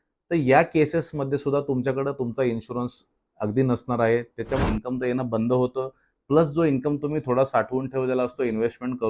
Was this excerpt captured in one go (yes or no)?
no